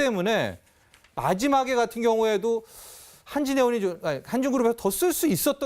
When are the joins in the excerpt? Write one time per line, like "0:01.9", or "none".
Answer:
0:02.7